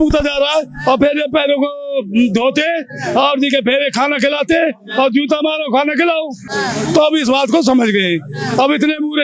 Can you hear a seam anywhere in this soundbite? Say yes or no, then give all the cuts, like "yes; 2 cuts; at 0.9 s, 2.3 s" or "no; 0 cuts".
no; 0 cuts